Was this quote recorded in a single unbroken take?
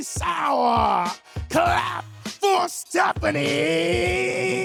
yes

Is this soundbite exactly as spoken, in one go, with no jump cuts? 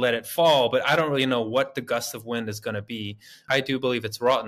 no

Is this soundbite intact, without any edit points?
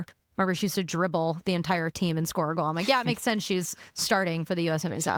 yes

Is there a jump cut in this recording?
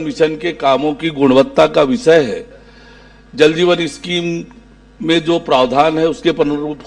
no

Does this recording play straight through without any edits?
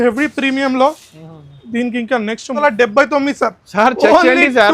no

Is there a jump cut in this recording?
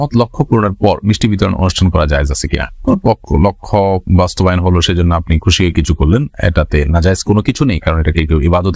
no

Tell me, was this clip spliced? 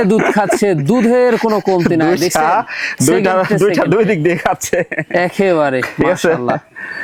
no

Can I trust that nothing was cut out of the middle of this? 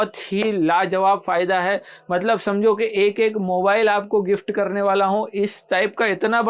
yes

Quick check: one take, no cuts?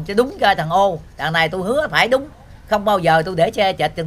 yes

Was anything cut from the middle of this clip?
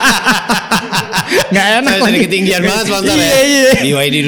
no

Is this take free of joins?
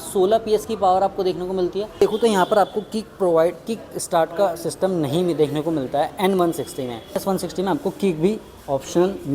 no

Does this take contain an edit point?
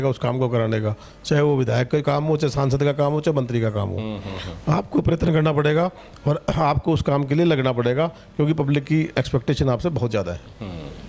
no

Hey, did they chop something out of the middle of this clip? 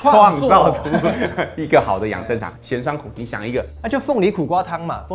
yes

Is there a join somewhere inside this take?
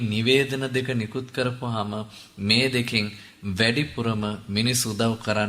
no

